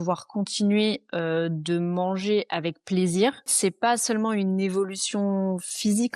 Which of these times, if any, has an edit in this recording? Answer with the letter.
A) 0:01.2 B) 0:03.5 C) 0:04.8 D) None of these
B